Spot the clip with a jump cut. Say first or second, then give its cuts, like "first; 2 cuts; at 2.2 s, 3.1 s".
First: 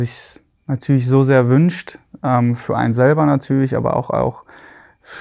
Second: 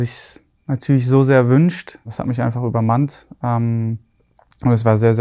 second; 1 cut; at 2.1 s